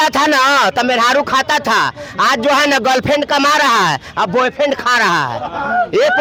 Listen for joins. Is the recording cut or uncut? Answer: uncut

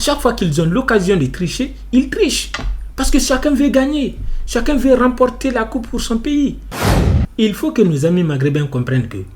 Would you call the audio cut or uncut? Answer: cut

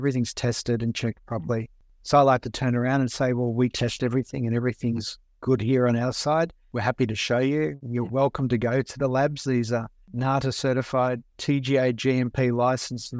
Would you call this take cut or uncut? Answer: cut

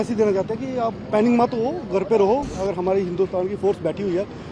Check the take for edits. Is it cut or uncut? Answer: cut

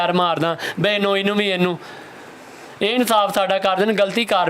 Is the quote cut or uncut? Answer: uncut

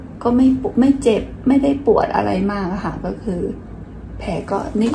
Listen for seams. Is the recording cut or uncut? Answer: uncut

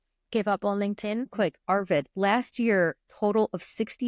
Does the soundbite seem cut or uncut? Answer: cut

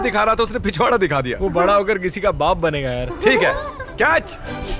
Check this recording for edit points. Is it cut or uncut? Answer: uncut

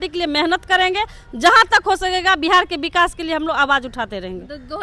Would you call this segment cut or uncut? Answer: uncut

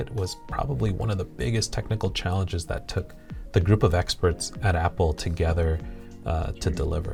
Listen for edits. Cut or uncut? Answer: uncut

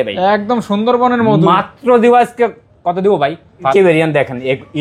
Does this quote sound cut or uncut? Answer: cut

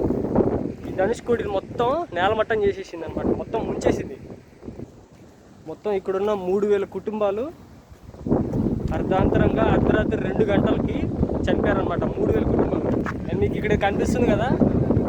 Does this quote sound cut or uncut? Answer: cut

